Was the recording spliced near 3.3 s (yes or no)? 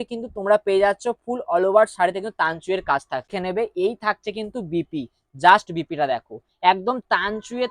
yes